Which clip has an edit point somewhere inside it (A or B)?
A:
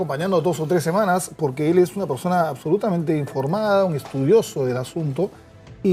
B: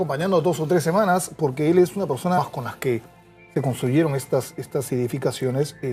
A